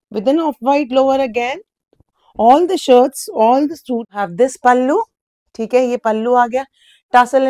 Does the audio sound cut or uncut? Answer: cut